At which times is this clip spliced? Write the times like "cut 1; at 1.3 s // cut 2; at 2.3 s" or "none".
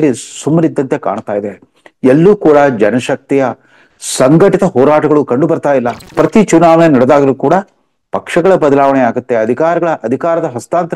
cut 1; at 6.0 s